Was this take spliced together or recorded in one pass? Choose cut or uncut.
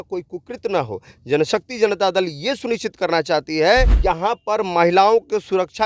cut